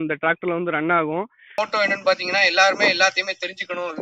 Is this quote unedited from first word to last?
no; 1 cut; at 1.6 s

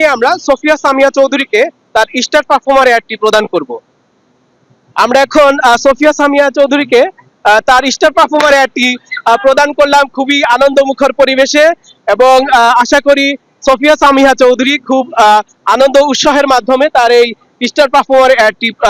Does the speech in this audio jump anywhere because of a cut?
no; 0 cuts

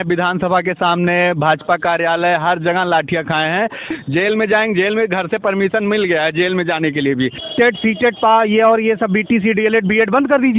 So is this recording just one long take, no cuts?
no; 2 cuts; at 3.9 s, 7.4 s

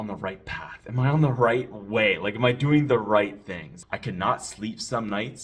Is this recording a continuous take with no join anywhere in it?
no; 1 cut; at 3.8 s

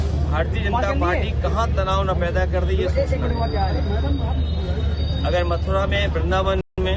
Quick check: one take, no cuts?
yes; 0 cuts

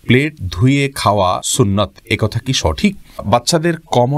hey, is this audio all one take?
no; 2 cuts; at 1.5 s, 3.2 s

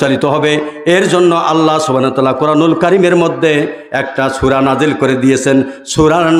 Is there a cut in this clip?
no; 0 cuts

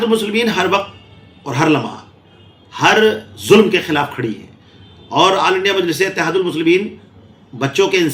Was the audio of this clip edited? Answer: no; 0 cuts

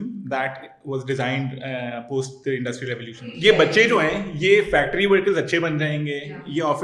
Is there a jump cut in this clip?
yes; 1 cut; at 3.3 s

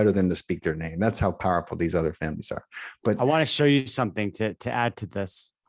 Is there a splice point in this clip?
no; 0 cuts

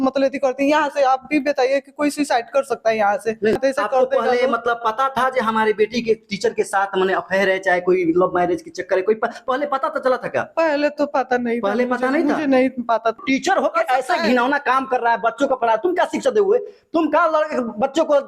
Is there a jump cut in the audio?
yes; 2 cuts; at 3.6 s, 13.2 s

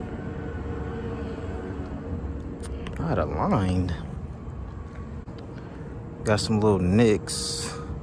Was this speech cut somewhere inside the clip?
yes; 1 cut; at 5.3 s

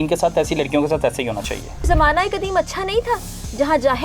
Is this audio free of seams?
no; 1 cut; at 1.9 s

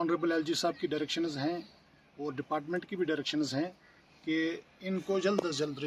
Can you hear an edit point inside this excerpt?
no; 0 cuts

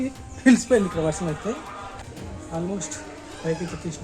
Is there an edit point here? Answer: yes; 1 cut; at 2.0 s

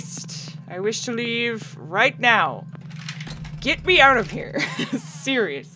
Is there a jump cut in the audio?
no; 0 cuts

